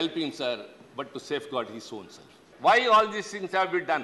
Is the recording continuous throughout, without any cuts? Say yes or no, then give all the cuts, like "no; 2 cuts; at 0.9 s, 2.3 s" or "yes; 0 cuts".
no; 1 cut; at 2.5 s